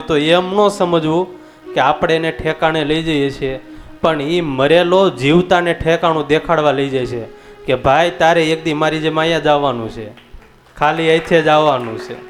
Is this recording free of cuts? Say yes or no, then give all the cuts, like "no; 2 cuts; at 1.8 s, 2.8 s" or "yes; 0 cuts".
yes; 0 cuts